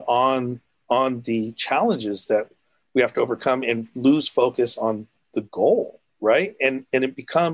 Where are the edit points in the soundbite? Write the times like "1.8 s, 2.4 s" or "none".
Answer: none